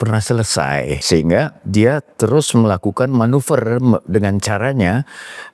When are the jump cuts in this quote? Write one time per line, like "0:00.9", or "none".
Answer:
0:01.0